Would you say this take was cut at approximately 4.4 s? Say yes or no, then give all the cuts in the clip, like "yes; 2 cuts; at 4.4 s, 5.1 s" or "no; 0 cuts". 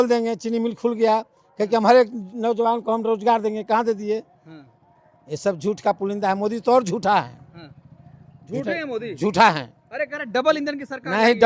no; 0 cuts